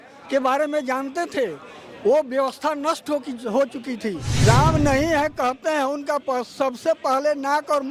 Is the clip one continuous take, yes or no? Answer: no